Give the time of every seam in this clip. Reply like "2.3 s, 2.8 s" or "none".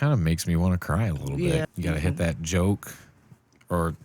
1.7 s